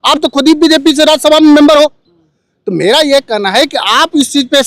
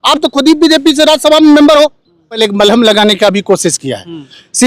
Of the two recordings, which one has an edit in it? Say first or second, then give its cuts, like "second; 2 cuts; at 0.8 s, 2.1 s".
second; 1 cut; at 2.4 s